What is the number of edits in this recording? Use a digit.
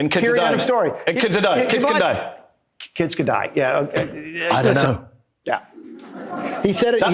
1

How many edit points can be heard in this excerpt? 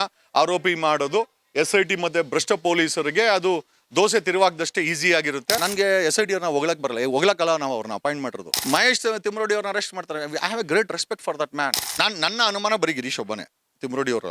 3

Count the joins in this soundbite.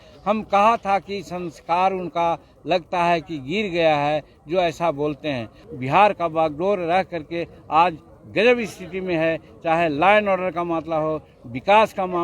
1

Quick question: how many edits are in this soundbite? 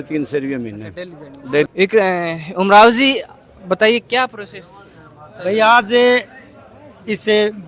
1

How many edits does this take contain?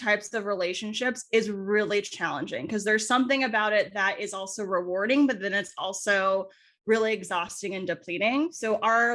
0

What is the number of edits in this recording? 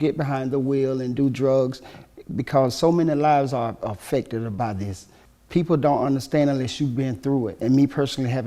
2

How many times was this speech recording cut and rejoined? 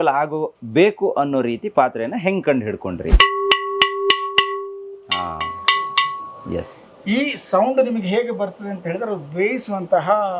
1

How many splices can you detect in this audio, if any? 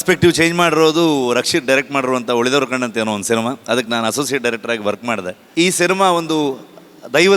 1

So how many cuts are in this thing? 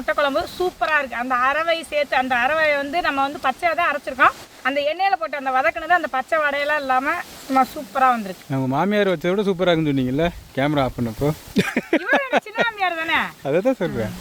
3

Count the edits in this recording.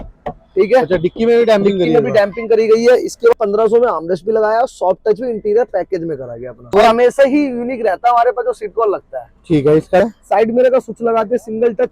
3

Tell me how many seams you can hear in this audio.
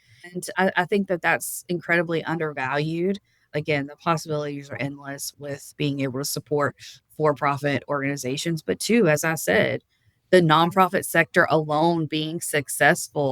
2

